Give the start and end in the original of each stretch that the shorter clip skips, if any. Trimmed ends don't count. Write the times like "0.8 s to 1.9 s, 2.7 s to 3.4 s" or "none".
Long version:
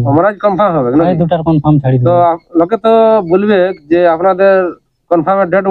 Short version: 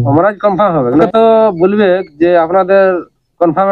1.0 s to 2.8 s